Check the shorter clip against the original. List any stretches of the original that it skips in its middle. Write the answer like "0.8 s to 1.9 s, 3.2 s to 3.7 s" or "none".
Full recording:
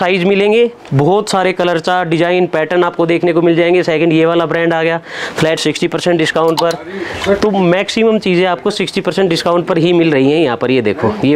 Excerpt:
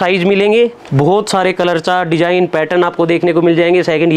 none